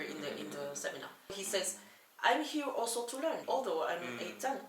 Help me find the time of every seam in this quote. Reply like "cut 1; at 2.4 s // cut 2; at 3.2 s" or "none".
cut 1; at 1.4 s // cut 2; at 3.4 s